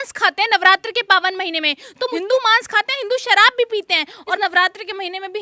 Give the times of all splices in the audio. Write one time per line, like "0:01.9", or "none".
0:02.1
0:04.4

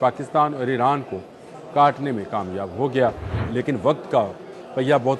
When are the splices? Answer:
0:03.3

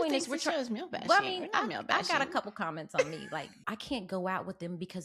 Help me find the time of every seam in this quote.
0:03.6

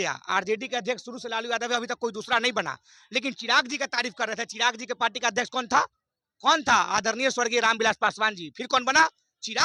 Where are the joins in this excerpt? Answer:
none

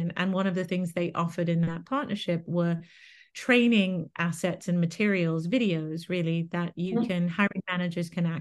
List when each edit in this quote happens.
none

